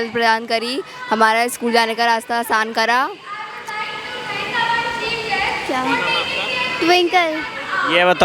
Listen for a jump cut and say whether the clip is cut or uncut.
uncut